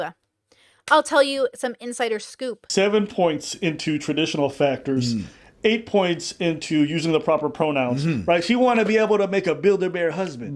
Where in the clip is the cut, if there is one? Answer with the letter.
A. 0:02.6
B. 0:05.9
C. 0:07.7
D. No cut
A